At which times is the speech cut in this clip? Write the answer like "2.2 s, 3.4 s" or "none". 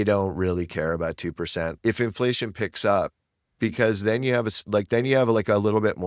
1.8 s